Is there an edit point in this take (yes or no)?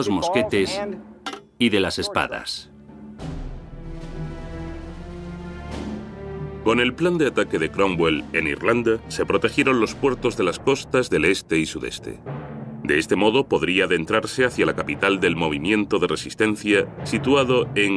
no